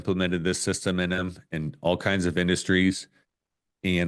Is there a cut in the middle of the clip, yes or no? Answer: no